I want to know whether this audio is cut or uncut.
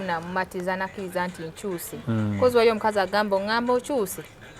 uncut